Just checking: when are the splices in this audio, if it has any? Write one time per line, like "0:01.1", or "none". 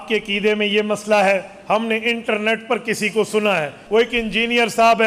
0:03.8